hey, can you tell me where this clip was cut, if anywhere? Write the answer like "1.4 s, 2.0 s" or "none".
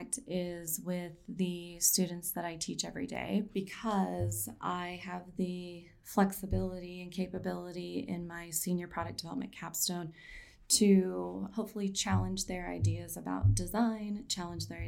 3.5 s